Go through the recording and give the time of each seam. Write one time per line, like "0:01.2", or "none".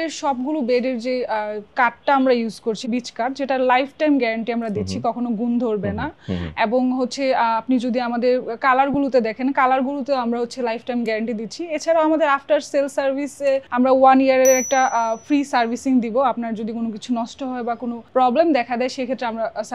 none